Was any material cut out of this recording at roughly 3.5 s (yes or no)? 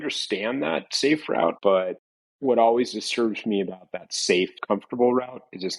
no